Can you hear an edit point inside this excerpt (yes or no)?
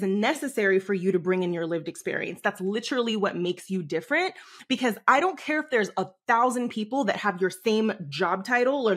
no